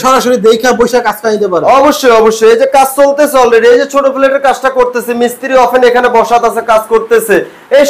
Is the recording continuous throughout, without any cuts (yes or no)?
yes